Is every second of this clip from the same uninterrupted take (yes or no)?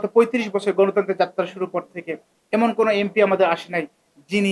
yes